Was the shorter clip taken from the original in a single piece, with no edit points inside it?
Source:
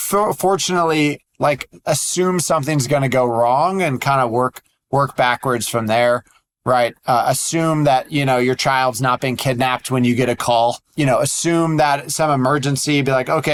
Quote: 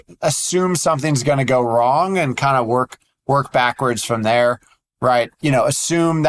no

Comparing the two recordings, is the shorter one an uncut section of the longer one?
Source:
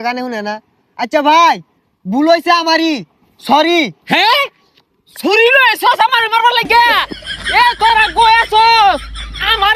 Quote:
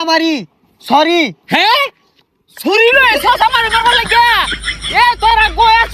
yes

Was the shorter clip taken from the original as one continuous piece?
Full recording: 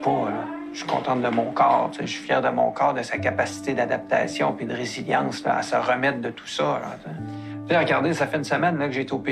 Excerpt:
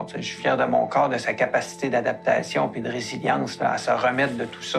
yes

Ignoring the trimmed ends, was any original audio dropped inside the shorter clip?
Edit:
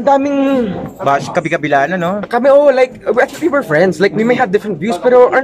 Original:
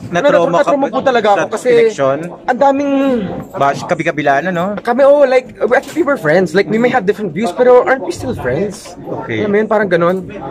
no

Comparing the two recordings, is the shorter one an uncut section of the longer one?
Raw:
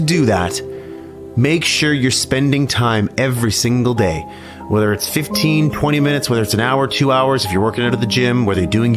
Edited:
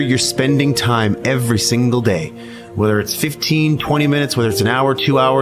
yes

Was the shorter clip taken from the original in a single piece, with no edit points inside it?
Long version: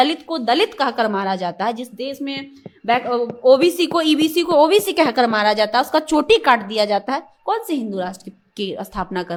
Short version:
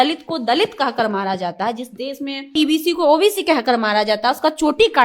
no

